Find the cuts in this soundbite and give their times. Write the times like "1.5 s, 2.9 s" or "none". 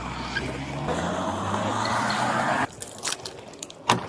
2.7 s